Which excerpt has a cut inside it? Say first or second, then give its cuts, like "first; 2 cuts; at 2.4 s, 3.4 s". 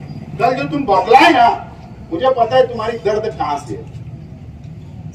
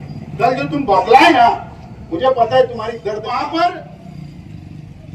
second; 1 cut; at 3.2 s